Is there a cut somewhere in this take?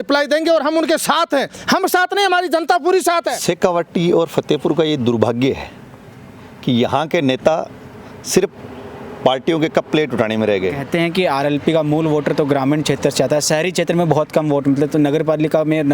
yes; 2 cuts; at 3.3 s, 10.8 s

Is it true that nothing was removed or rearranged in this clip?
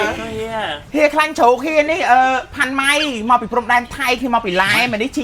yes; 0 cuts

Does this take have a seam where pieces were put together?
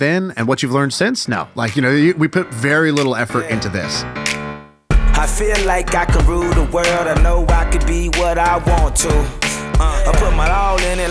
yes; 1 cut; at 4.1 s

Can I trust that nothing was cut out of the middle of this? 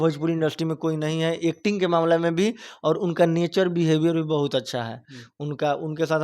yes; 0 cuts

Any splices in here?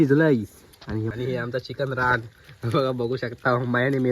yes; 1 cut; at 1.1 s

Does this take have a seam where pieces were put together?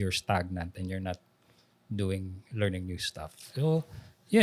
no; 0 cuts

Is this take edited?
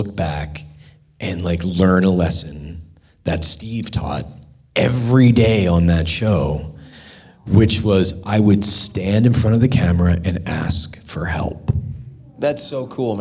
no; 0 cuts

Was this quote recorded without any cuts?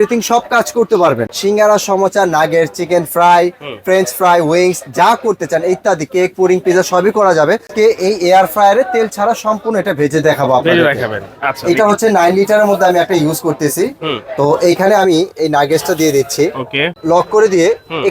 no; 3 cuts; at 1.3 s, 7.7 s, 16.9 s

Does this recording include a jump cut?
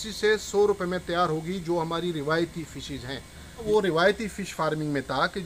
yes; 1 cut; at 3.6 s

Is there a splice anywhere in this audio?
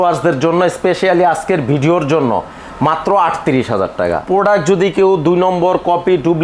yes; 1 cut; at 4.2 s

